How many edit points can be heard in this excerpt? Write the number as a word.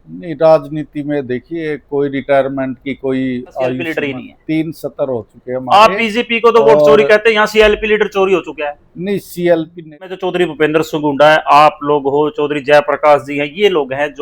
two